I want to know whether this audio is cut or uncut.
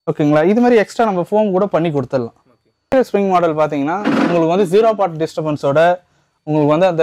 cut